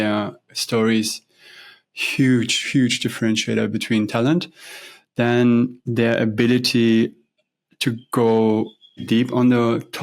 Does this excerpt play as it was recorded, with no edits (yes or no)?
no